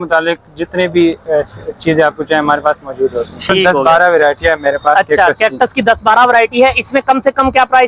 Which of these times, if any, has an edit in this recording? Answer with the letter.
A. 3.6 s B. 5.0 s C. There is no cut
A